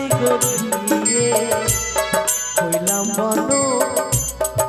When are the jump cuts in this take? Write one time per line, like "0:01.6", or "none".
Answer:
none